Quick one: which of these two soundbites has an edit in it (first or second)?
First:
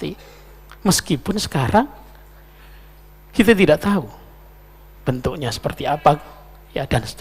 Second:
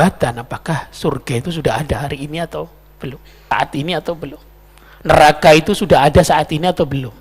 second